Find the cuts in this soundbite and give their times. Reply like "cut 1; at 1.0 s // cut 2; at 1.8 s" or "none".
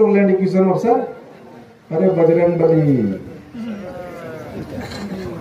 none